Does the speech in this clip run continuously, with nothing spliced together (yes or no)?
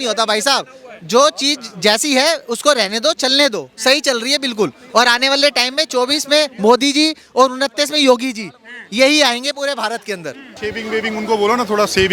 no